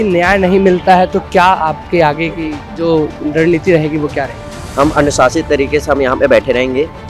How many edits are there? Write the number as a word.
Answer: zero